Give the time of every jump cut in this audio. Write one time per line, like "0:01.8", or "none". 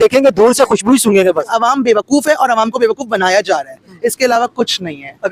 0:01.5